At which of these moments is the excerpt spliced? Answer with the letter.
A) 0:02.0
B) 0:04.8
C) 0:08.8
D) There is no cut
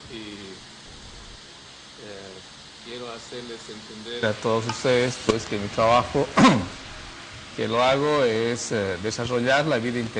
C